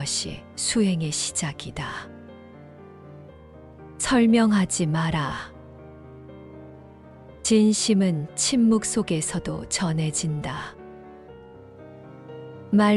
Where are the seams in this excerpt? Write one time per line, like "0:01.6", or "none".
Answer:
0:02.0
0:03.9
0:05.4
0:06.9